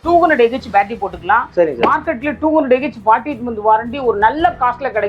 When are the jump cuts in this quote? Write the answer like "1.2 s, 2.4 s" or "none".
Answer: none